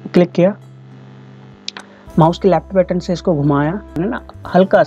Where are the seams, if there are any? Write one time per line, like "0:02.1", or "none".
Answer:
0:04.0